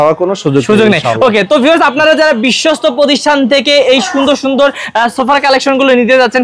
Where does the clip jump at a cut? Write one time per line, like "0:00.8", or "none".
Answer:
none